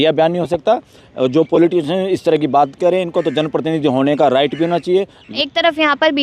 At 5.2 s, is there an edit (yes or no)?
yes